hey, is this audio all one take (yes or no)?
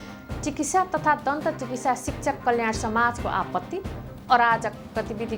yes